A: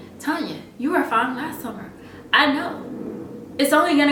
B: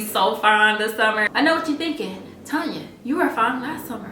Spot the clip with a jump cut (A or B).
B